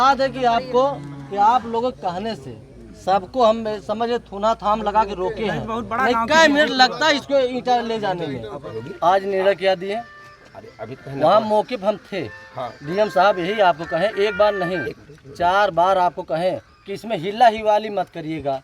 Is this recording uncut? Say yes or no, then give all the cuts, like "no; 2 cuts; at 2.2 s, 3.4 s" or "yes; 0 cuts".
no; 1 cut; at 8.8 s